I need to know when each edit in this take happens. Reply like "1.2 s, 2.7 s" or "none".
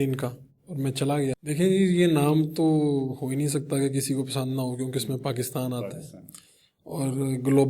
1.4 s